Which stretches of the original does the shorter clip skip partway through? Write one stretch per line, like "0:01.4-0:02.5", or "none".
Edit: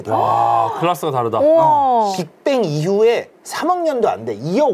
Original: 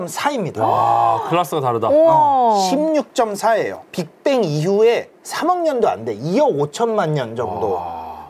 0:02.6-0:03.9